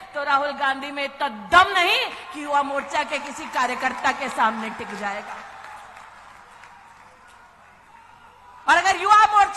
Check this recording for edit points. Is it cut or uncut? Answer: uncut